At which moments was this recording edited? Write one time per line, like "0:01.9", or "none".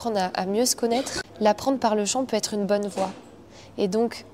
0:01.2